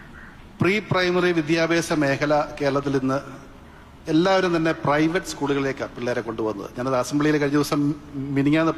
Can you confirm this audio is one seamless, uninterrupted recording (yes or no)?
yes